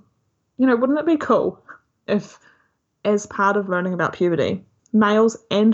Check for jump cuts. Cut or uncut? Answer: cut